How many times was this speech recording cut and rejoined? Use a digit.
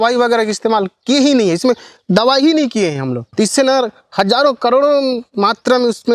1